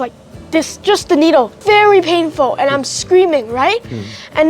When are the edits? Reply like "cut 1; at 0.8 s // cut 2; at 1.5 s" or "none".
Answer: cut 1; at 1.5 s